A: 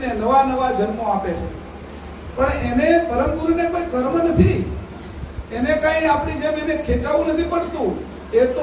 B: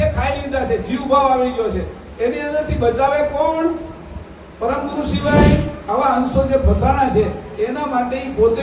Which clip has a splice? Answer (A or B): B